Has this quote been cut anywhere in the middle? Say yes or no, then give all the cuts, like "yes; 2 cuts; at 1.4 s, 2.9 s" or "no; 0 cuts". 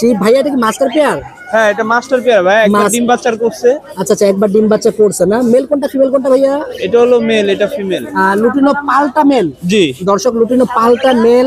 no; 0 cuts